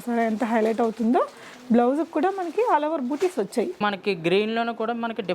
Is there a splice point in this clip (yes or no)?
yes